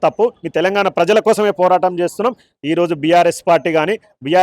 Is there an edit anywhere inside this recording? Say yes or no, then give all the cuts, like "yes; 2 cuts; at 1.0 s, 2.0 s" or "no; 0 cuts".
yes; 1 cut; at 2.5 s